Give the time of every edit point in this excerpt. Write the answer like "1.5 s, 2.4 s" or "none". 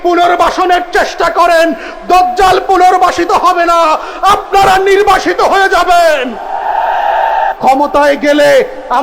7.5 s